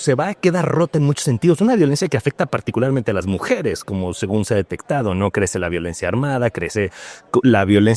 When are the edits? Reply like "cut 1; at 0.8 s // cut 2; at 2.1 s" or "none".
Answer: none